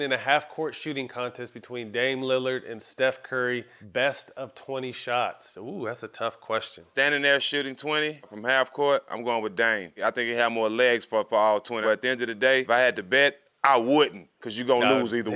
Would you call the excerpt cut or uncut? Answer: cut